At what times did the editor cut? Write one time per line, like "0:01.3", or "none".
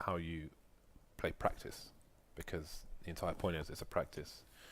0:02.5